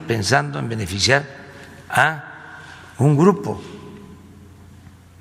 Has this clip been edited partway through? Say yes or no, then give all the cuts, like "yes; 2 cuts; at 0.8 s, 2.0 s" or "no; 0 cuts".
no; 0 cuts